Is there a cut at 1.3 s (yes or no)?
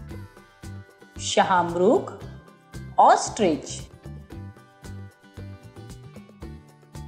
no